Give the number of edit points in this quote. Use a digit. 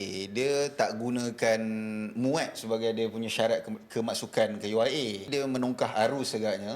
1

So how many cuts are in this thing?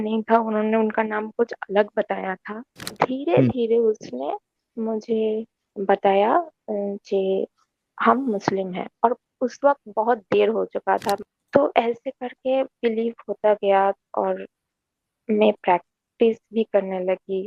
2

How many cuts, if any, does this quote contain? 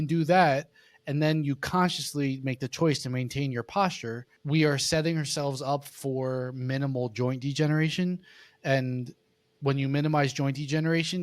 1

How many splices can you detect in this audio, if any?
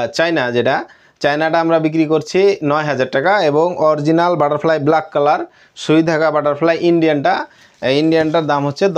0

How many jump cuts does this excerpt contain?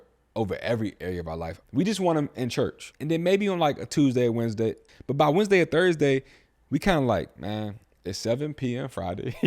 3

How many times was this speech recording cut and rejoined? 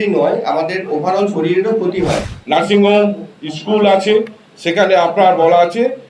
1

